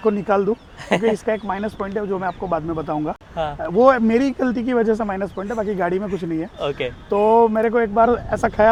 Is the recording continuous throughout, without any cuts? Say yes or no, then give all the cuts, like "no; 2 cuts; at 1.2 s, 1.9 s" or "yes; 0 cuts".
yes; 0 cuts